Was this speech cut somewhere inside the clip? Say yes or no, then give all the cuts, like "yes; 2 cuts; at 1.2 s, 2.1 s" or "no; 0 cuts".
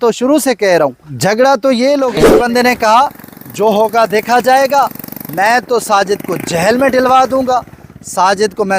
yes; 1 cut; at 2.3 s